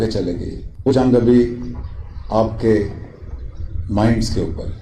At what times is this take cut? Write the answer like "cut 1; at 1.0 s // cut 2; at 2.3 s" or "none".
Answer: cut 1; at 0.9 s